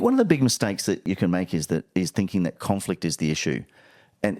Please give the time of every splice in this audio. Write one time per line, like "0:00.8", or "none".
0:01.1

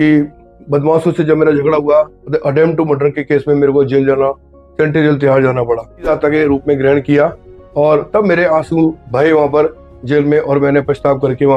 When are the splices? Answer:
0:06.1

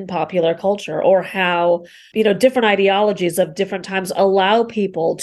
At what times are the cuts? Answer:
none

